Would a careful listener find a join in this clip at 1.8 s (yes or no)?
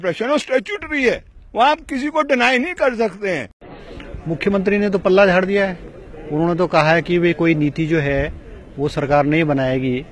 no